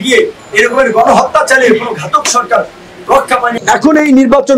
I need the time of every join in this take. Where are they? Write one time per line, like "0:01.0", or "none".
0:03.5